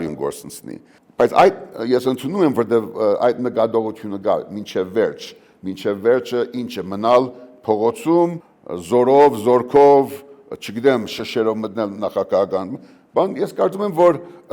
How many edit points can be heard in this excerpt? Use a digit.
0